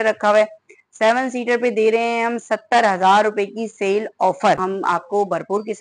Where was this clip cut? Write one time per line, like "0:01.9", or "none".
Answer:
0:04.6